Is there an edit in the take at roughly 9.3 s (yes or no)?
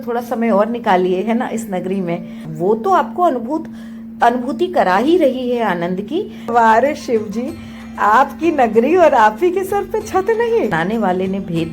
no